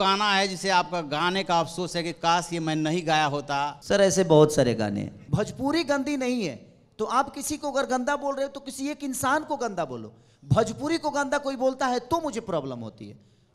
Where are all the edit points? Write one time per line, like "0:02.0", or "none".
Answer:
0:03.8
0:05.2